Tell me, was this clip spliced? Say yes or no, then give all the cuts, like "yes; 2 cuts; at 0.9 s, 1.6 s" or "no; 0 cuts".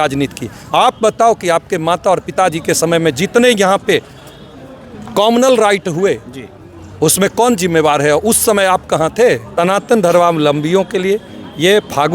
yes; 1 cut; at 9.5 s